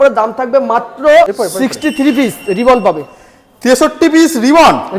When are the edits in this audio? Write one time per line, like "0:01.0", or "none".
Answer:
0:01.3